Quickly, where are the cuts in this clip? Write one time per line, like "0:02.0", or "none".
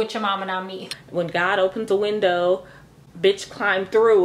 0:00.9